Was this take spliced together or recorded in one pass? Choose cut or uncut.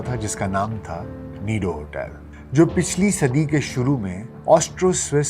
uncut